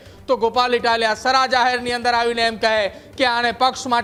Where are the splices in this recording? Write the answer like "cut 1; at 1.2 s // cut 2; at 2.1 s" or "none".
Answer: none